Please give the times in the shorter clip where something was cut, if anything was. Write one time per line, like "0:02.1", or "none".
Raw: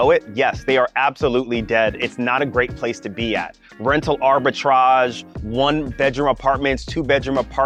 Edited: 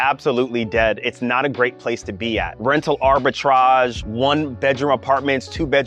0:02.5
0:04.0